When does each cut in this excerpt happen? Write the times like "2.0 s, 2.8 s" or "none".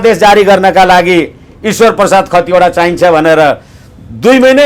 none